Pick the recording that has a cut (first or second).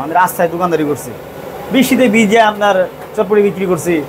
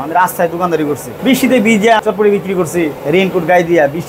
second